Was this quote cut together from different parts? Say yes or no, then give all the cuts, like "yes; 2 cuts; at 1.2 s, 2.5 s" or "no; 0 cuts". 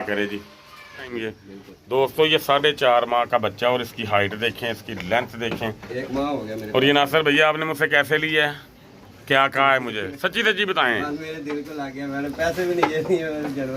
yes; 1 cut; at 1.1 s